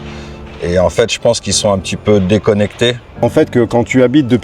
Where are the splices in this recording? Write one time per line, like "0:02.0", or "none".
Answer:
0:03.2